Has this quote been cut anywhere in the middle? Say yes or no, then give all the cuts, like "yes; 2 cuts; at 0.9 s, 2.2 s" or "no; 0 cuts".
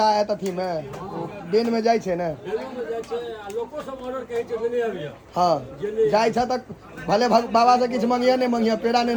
no; 0 cuts